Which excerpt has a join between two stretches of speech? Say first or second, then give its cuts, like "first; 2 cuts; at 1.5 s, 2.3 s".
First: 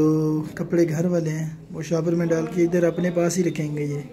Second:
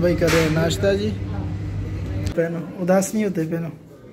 second; 1 cut; at 2.3 s